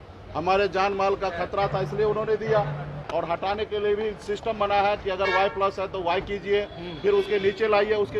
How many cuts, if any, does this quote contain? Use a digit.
1